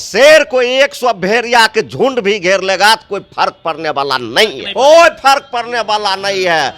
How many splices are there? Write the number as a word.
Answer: one